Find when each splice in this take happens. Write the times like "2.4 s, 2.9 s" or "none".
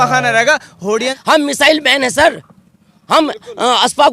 1.2 s